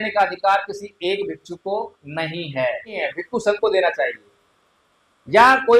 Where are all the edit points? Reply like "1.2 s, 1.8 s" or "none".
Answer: 3.1 s